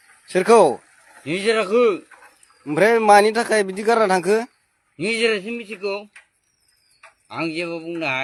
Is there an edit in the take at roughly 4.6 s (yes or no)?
no